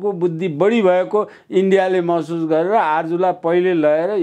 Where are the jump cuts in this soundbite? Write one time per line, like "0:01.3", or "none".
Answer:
none